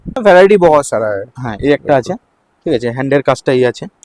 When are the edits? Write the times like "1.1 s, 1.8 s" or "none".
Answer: none